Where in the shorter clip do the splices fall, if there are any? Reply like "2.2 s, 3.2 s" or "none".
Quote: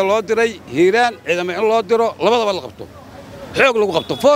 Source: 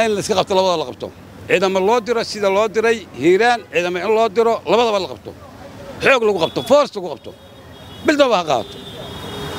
none